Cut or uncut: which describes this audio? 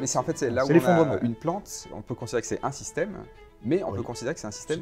cut